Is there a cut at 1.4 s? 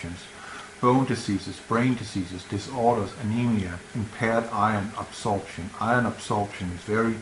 yes; 1 cut; at 1.4 s

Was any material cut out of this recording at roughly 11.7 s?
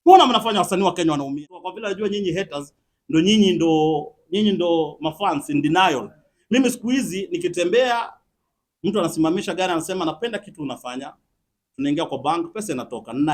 no; 1 cut; at 1.3 s

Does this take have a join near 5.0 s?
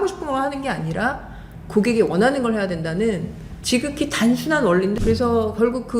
yes; 1 cut; at 5.0 s

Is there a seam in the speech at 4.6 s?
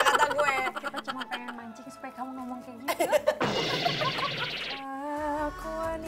yes; 1 cut; at 4.6 s

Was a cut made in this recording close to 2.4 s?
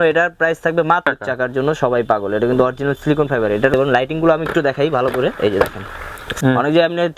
no; 3 cuts; at 1.1 s, 3.7 s, 6.3 s

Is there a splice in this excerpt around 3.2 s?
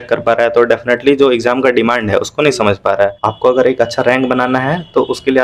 yes; 1 cut; at 3.2 s

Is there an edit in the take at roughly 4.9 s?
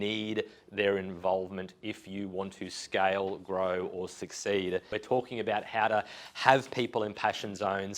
yes; 1 cut; at 4.9 s

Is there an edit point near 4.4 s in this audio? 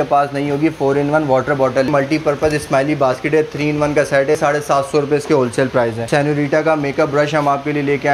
yes; 3 cuts; at 1.9 s, 4.4 s, 6.0 s

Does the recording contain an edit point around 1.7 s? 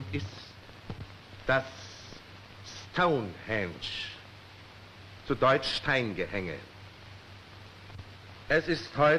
yes; 1 cut; at 1.7 s

